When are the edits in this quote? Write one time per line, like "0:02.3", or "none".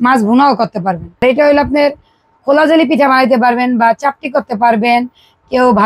0:01.2